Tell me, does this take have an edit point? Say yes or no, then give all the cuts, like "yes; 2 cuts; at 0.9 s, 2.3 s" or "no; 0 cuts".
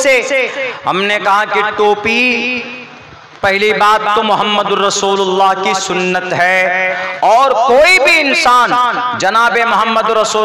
no; 0 cuts